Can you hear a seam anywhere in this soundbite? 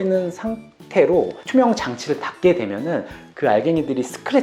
yes; 1 cut; at 1.4 s

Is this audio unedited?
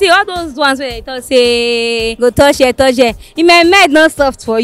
no; 1 cut; at 2.1 s

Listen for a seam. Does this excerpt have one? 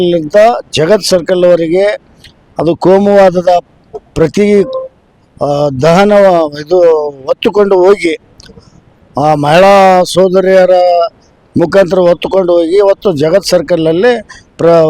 no; 0 cuts

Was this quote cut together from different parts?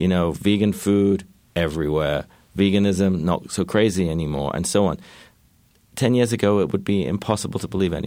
no; 0 cuts

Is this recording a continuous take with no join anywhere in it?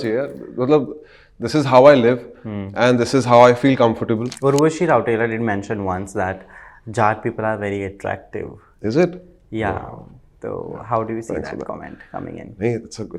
no; 1 cut; at 4.3 s

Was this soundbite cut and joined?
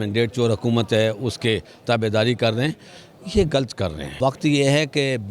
yes; 1 cut; at 4.0 s

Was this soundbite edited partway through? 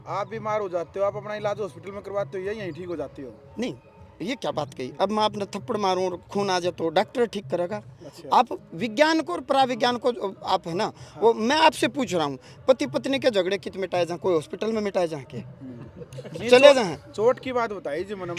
no; 0 cuts

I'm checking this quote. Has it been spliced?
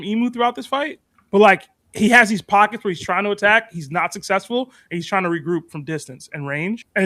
no; 0 cuts

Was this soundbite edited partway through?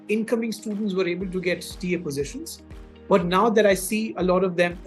no; 0 cuts

